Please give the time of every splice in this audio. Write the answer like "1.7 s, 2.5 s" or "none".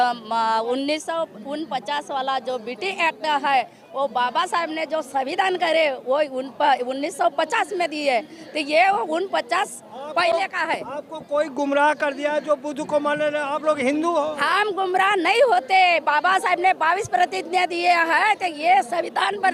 none

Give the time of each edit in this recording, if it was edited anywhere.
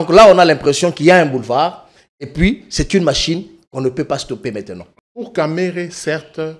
4.8 s

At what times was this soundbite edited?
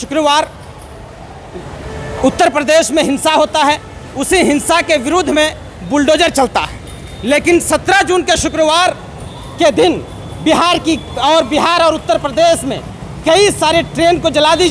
none

